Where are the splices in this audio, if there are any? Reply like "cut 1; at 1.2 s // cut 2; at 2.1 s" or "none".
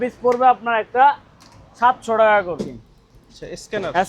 cut 1; at 2.6 s